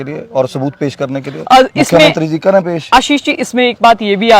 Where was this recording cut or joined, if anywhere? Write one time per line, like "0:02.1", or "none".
none